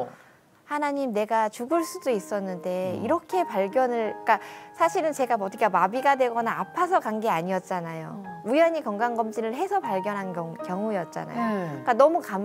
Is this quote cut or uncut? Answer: uncut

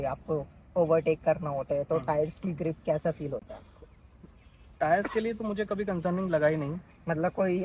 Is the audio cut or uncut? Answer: uncut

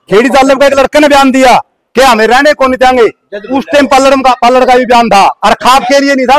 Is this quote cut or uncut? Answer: uncut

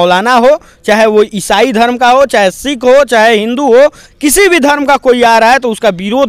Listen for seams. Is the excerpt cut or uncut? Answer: uncut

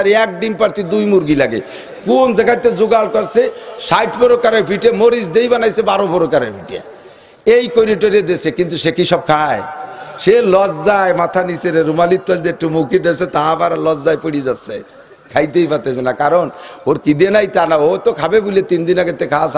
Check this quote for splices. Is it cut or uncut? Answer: uncut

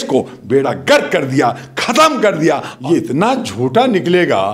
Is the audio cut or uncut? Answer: cut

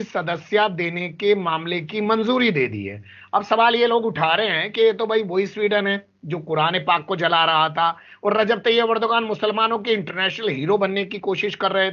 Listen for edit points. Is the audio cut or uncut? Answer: uncut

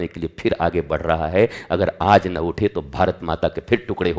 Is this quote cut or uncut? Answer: uncut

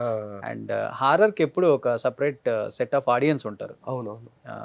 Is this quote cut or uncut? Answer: uncut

